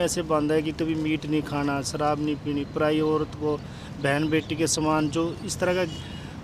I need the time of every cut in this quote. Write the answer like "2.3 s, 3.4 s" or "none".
none